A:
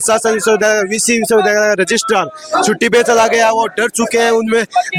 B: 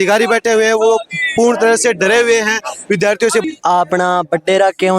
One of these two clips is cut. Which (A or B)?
B